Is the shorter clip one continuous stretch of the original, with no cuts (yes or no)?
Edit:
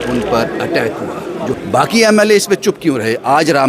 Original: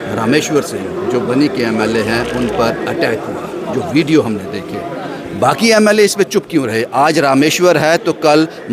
no